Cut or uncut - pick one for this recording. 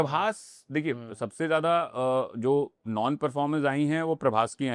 uncut